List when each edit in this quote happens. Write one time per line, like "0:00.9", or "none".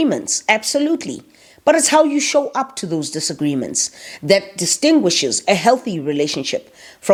none